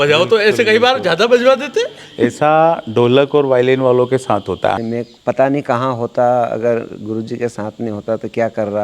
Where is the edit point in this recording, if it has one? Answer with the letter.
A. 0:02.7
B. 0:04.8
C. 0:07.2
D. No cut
B